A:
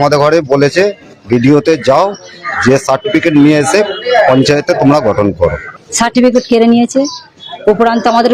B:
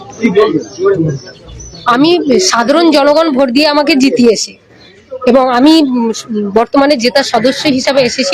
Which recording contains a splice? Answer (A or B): A